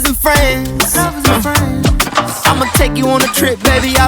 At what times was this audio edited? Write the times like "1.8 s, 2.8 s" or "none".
none